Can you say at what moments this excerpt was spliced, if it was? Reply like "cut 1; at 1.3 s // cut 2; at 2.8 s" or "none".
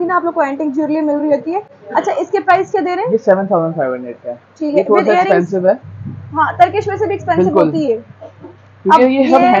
none